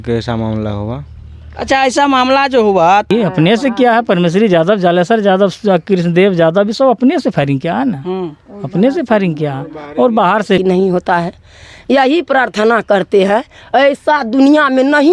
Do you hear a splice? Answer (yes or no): yes